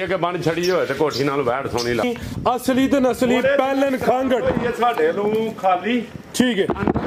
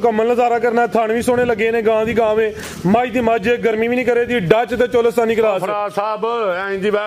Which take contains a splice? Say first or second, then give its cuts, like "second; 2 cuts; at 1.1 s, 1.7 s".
first; 1 cut; at 2.0 s